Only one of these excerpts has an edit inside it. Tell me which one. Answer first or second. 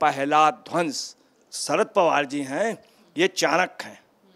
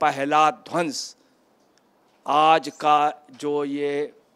first